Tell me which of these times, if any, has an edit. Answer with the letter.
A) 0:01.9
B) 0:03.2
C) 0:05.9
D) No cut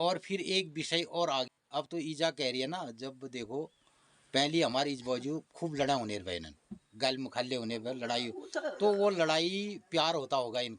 A